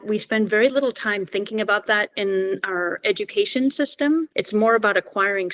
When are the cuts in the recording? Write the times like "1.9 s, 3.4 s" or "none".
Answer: 4.4 s